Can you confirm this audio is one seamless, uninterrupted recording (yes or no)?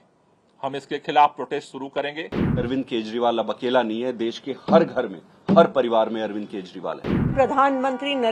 no